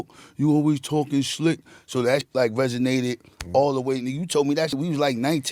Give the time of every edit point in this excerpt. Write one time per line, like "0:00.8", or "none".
0:02.3
0:04.7